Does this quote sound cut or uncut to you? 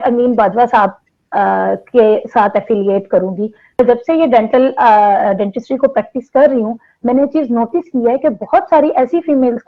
cut